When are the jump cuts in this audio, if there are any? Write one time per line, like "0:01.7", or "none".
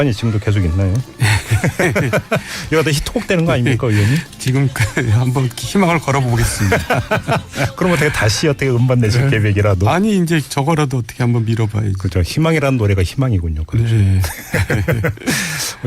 0:09.6